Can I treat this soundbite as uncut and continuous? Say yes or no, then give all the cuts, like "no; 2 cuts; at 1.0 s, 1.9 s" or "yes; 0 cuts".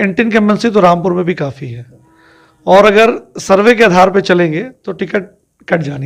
yes; 0 cuts